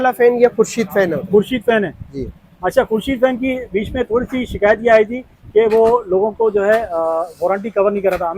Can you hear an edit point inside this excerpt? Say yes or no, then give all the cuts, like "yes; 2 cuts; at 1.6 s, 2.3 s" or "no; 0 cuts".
no; 0 cuts